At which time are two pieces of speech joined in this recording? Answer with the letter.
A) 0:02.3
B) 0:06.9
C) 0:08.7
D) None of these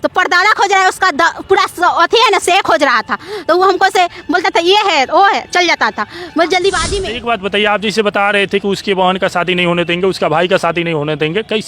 B